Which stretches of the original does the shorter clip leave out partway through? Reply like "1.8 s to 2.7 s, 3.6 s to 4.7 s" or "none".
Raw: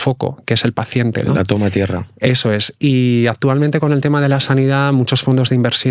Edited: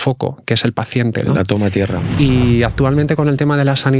2.1 s to 2.7 s